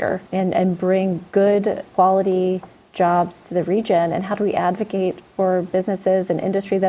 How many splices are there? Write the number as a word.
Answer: two